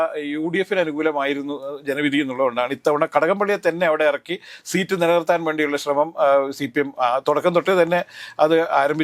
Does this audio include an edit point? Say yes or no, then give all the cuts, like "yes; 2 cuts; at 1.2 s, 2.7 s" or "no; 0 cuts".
no; 0 cuts